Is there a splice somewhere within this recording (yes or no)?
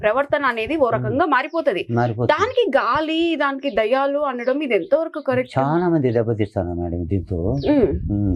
no